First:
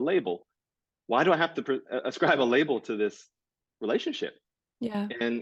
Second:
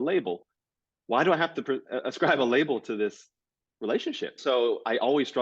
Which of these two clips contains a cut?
second; 1 cut; at 4.4 s

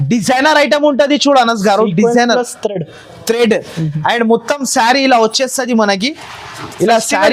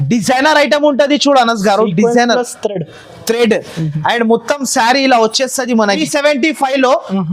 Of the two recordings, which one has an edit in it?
second; 1 cut; at 6.0 s

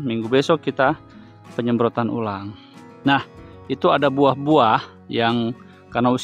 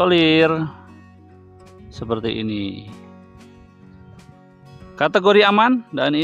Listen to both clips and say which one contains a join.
second; 2 cuts; at 2.8 s, 4.3 s

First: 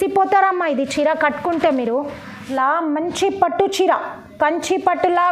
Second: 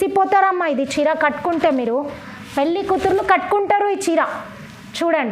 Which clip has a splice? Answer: first; 1 cut; at 2.4 s

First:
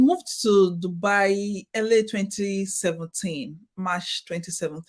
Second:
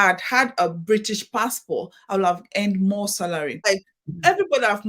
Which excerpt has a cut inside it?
second; 1 cut; at 3.5 s

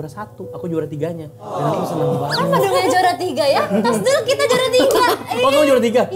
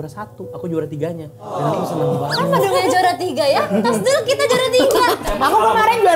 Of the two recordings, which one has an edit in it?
second; 1 cut; at 5.3 s

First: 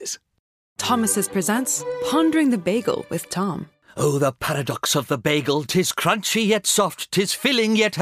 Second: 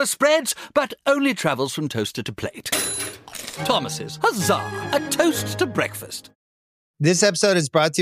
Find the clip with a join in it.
second; 1 cut; at 6.4 s

